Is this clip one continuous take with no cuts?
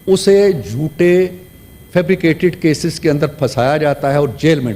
yes; 0 cuts

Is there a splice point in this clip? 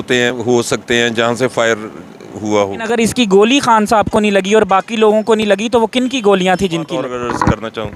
yes; 2 cuts; at 2.9 s, 6.9 s

